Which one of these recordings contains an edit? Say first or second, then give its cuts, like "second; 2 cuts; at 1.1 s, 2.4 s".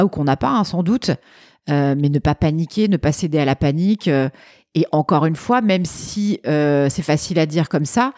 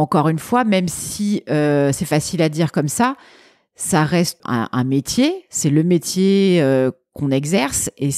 second; 1 cut; at 4.4 s